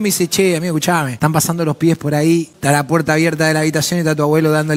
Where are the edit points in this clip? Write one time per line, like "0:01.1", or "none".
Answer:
0:01.1
0:02.5